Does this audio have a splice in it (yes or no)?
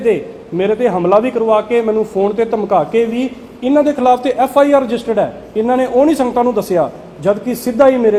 no